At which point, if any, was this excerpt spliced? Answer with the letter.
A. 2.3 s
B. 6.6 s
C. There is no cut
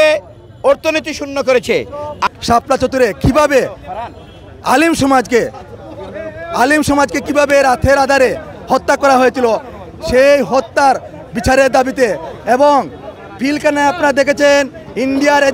A